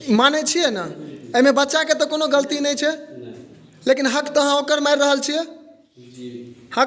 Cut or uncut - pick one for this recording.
uncut